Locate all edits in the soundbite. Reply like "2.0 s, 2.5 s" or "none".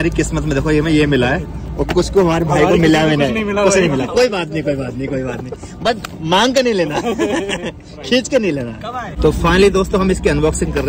none